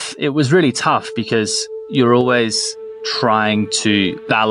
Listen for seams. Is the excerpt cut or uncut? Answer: uncut